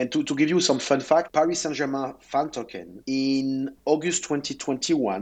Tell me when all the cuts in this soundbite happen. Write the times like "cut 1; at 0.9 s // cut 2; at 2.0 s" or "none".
cut 1; at 1.3 s